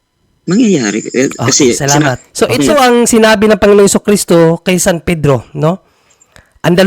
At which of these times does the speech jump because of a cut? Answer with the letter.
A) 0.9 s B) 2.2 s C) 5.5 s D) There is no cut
B